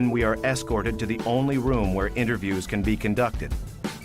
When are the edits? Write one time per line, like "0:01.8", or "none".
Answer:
0:02.8